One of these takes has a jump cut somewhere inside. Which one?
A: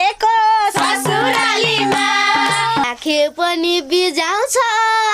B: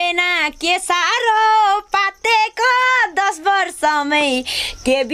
A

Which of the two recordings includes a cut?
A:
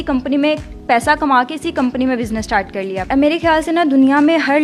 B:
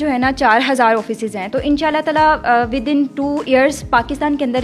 A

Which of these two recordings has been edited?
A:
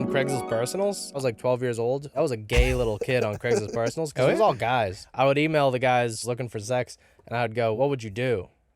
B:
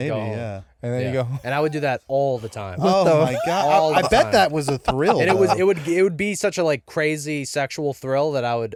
A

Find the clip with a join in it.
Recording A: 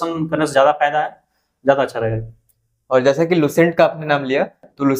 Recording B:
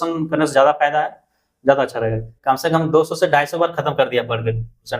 B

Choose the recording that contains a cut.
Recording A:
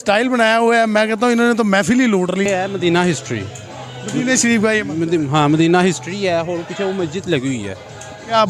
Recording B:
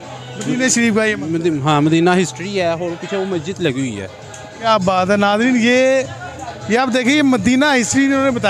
A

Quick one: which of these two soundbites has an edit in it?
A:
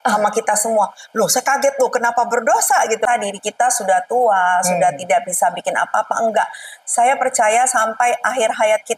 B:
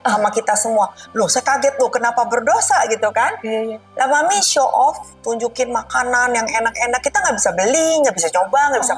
A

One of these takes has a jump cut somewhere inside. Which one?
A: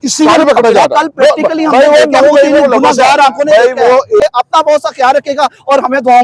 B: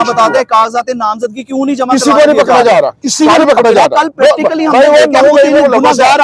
A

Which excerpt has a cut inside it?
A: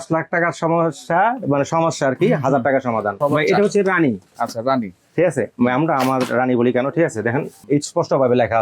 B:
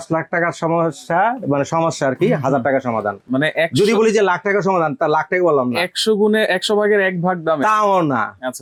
A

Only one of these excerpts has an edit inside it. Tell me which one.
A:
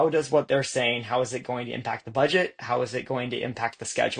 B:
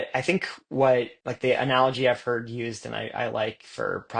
B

